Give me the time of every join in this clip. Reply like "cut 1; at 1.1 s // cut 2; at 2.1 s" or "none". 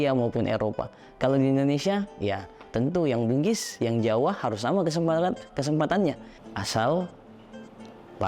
cut 1; at 6.3 s